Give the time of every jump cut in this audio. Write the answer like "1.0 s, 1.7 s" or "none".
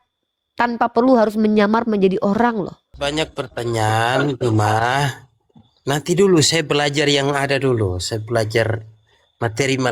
2.8 s